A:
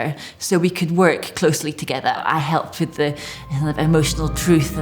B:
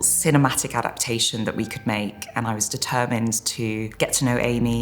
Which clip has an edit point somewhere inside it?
B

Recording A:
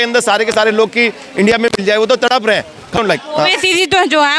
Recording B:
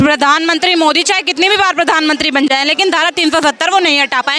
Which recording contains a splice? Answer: A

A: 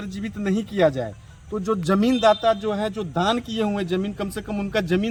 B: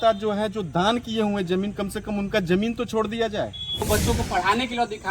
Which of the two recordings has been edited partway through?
B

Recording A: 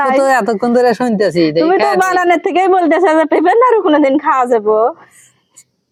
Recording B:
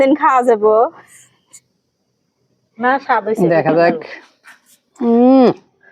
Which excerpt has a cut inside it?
B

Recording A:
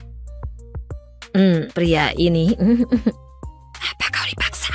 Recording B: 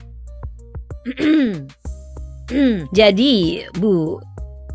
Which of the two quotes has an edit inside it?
B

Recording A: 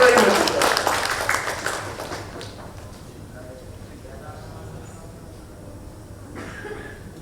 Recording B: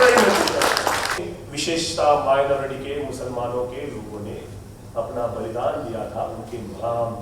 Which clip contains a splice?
B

